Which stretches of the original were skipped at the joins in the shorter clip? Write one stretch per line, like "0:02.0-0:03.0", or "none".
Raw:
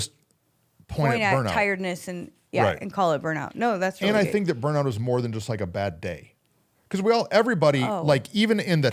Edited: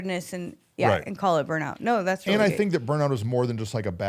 none